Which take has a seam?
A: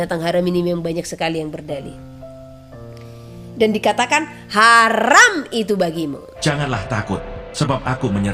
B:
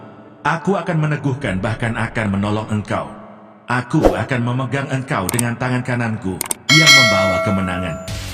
A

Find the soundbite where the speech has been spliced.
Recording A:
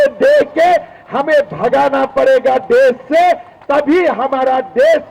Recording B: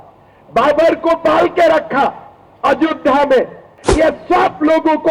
B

